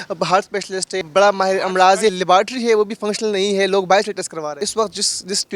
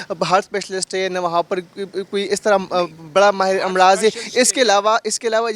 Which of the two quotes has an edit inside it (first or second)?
first